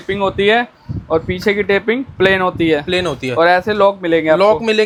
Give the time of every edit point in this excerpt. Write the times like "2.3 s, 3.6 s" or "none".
none